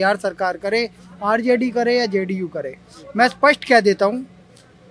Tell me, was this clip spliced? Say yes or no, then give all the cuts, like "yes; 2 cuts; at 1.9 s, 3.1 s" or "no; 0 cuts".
no; 0 cuts